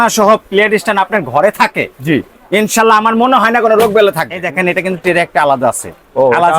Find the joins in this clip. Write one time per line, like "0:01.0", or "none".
0:04.3